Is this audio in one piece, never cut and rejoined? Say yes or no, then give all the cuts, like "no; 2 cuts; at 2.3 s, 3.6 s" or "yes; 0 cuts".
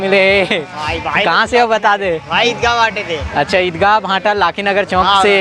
yes; 0 cuts